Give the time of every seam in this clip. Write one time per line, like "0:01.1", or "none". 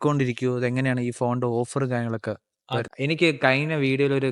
0:02.9